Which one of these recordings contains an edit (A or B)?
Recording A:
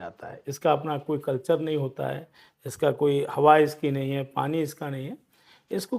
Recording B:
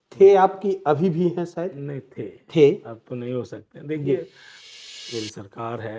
B